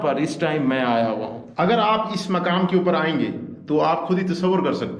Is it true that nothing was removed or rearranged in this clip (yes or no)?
yes